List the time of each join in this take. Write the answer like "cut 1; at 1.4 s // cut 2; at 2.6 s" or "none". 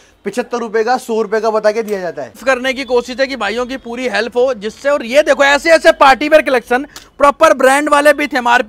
cut 1; at 2.4 s